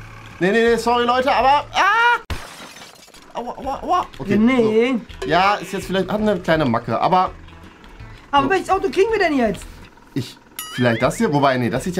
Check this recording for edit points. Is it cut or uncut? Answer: uncut